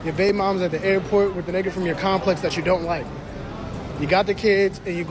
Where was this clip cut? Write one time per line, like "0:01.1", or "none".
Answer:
none